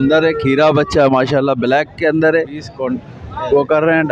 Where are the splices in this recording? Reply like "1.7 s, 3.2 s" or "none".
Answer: 2.8 s